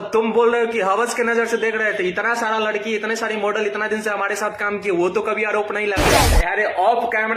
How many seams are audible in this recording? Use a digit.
1